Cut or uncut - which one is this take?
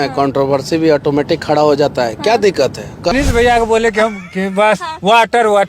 cut